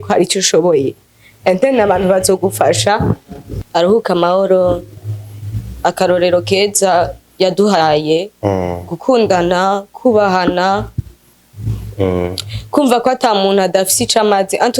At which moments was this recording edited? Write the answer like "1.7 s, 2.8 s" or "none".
3.5 s